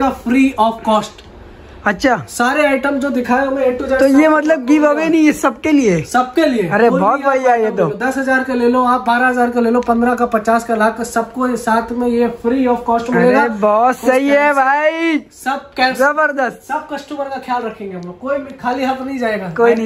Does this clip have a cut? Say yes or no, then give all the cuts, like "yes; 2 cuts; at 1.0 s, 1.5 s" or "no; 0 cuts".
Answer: no; 0 cuts